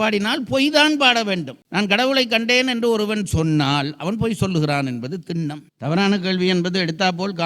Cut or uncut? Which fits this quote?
cut